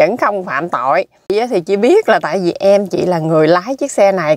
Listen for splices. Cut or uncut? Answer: cut